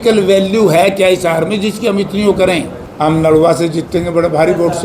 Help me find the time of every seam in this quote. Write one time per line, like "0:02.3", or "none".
0:02.8